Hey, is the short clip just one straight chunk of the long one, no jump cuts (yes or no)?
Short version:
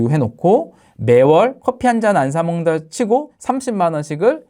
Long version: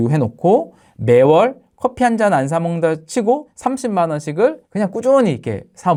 no